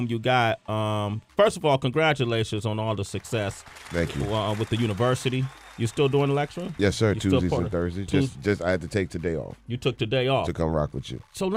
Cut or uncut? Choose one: uncut